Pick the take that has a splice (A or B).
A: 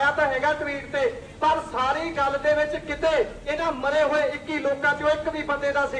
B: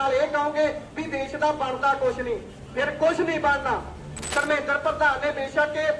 B